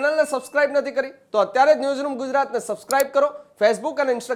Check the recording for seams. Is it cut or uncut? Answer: uncut